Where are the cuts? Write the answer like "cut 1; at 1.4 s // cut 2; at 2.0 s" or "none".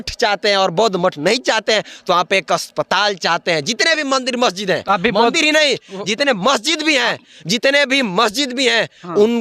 none